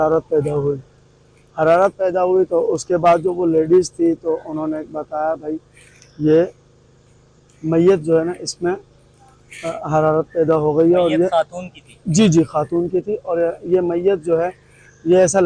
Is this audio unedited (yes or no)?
yes